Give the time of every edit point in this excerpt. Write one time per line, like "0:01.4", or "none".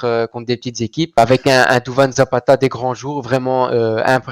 0:01.2

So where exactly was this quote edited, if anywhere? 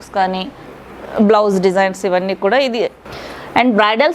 0:00.7
0:03.0

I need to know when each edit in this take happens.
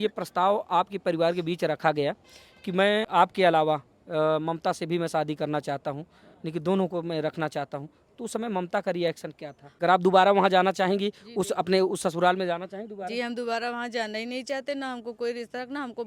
0:03.1
0:09.8

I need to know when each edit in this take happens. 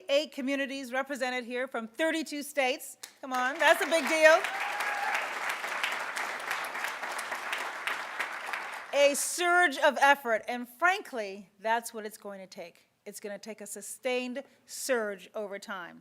0:07.6

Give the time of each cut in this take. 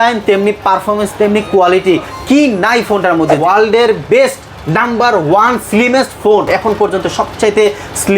0:03.4
0:06.5

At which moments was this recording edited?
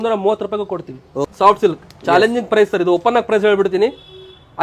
0:01.2

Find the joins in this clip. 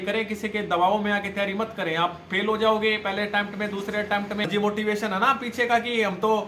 0:04.5

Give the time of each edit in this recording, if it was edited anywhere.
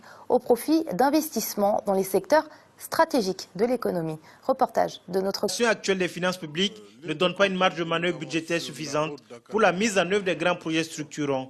none

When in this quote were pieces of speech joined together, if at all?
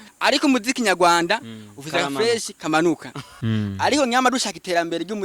0:03.3

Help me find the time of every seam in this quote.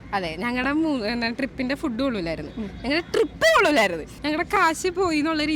0:04.1

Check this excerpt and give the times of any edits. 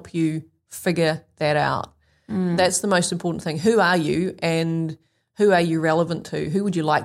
none

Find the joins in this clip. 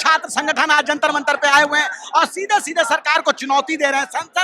none

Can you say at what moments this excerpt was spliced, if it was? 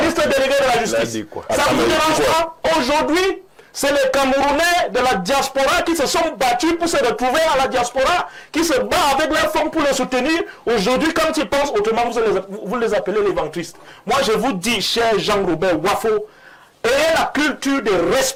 none

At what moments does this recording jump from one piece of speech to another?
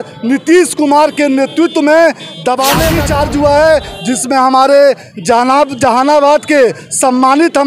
0:02.9

